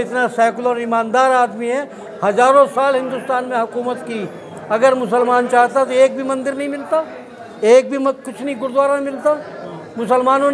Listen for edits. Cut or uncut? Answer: uncut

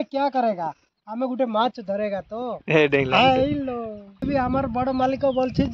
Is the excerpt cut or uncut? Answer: cut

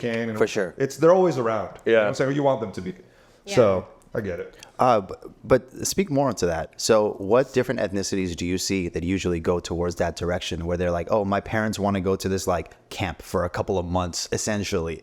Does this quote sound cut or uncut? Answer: uncut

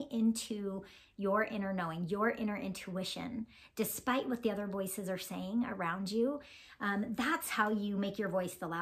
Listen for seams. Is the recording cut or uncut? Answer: uncut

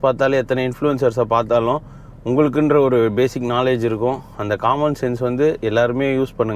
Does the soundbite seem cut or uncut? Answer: uncut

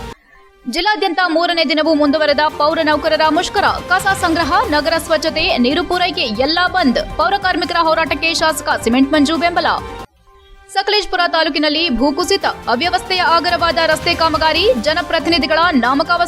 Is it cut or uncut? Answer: uncut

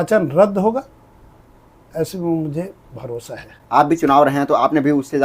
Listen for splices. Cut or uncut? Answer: cut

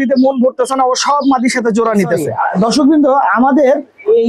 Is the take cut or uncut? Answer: cut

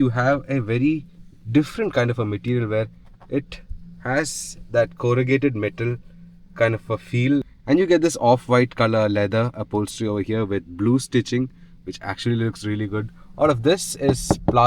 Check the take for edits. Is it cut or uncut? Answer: uncut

